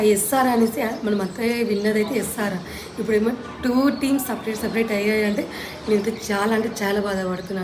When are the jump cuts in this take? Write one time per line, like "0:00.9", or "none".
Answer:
none